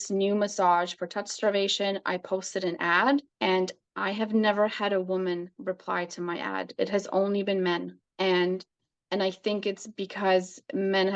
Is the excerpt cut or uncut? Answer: cut